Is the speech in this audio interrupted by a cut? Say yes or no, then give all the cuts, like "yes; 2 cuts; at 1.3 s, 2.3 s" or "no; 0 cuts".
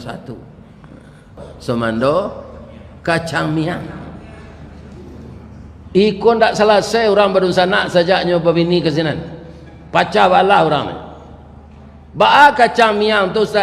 yes; 1 cut; at 1.5 s